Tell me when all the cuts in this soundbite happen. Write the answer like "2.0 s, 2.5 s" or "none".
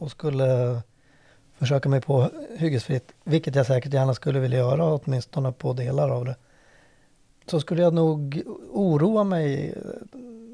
none